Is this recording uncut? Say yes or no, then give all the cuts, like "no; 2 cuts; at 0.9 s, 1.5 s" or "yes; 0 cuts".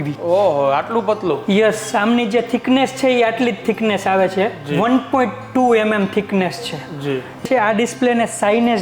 no; 1 cut; at 7.4 s